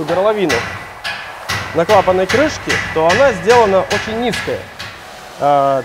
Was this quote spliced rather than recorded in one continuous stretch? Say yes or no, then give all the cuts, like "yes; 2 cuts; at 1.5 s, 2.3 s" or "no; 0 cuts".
no; 0 cuts